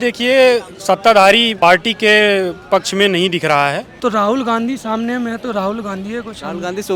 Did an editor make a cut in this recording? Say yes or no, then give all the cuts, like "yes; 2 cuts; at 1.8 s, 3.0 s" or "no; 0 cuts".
yes; 2 cuts; at 1.5 s, 3.9 s